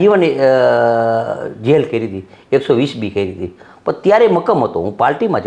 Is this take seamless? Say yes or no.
yes